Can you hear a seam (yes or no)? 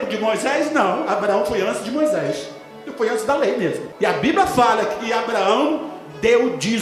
yes